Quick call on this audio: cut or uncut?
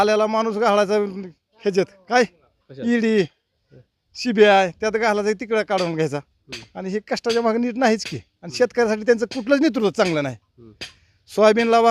uncut